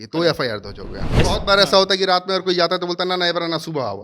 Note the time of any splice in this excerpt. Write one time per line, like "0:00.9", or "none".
0:01.2